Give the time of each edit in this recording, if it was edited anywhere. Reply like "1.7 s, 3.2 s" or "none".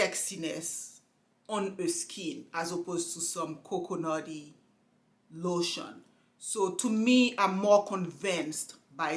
none